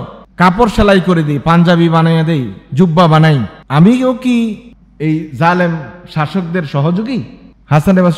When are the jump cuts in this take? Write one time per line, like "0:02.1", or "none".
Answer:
none